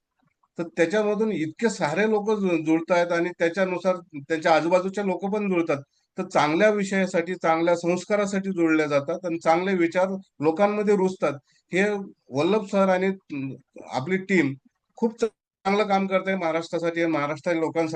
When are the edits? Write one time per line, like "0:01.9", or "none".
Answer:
none